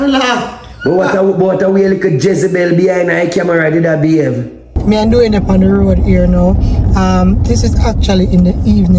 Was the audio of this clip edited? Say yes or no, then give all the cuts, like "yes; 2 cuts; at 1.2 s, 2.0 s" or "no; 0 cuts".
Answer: yes; 1 cut; at 4.7 s